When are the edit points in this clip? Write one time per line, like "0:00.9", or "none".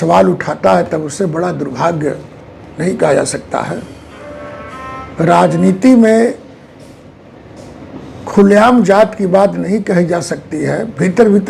none